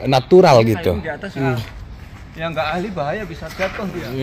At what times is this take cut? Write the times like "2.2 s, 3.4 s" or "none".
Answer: 1.4 s